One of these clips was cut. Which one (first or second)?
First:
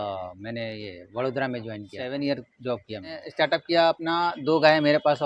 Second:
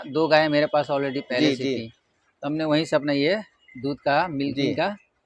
first